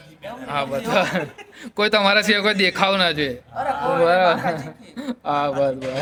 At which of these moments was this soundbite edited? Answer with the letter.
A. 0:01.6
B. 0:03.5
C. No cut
C